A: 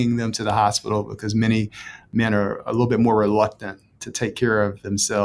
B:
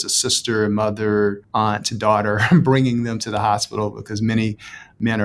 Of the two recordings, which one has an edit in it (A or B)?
B